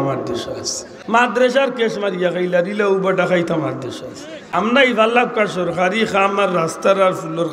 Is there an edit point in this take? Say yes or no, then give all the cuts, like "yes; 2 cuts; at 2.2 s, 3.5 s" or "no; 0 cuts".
yes; 2 cuts; at 1.2 s, 4.4 s